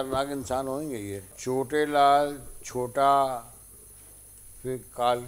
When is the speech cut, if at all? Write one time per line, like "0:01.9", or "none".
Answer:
0:01.3